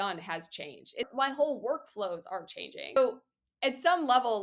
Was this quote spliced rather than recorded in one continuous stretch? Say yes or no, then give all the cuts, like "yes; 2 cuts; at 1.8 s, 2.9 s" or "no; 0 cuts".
yes; 2 cuts; at 1.1 s, 3.0 s